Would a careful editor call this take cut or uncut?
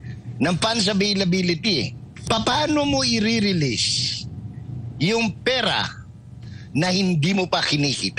cut